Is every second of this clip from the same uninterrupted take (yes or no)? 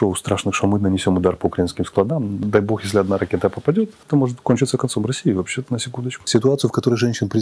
no